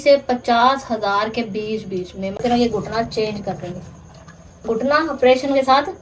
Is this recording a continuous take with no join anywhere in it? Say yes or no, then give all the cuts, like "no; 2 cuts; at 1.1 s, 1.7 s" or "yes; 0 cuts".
no; 1 cut; at 2.4 s